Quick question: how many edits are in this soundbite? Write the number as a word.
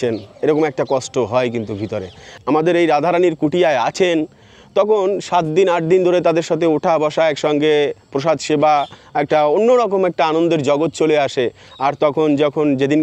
one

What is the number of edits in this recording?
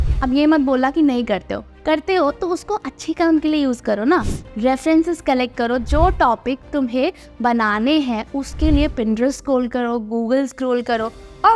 zero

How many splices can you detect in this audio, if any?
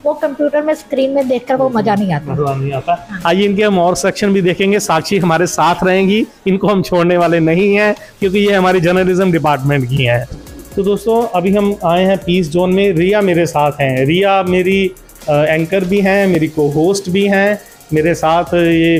zero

